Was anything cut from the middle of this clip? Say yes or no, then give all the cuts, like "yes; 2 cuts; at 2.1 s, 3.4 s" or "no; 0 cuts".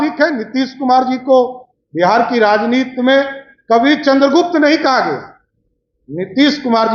no; 0 cuts